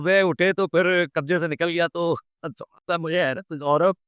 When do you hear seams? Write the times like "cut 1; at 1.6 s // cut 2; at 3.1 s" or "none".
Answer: none